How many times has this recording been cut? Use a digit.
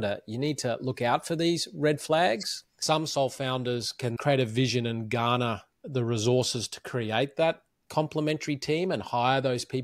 2